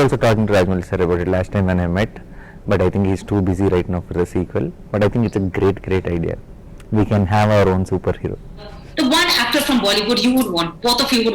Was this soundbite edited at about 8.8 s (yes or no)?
yes